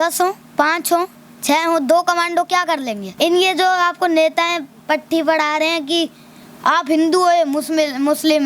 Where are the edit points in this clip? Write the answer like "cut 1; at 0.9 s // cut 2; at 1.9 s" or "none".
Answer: cut 1; at 3.0 s